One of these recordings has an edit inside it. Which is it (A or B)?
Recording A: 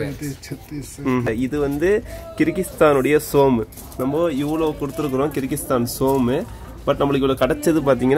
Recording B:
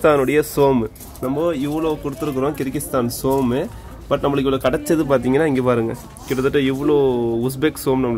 A